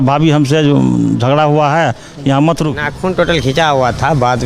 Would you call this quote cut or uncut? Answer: cut